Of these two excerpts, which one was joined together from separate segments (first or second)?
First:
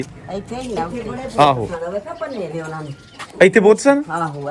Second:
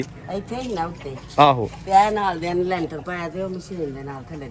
first